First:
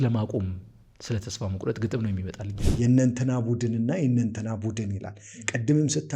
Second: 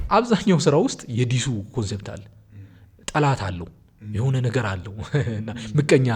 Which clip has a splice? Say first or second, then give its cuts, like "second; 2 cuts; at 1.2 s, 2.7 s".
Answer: first; 1 cut; at 2.4 s